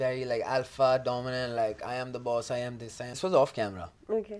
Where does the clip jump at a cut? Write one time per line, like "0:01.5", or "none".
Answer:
0:03.1